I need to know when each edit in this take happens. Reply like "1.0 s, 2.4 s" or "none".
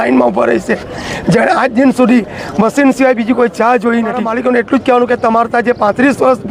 4.3 s

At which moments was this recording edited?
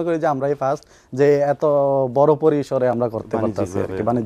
none

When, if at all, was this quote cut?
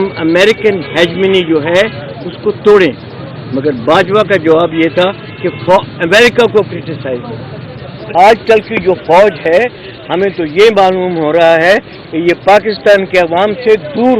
8.1 s

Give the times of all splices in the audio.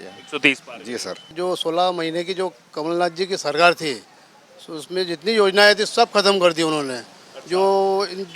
1.3 s

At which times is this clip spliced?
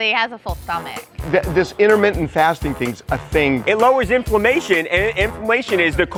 none

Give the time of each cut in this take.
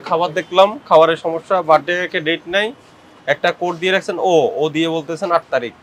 none

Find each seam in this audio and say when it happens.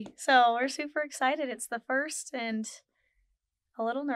none

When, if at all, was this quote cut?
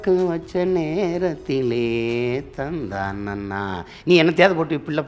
none

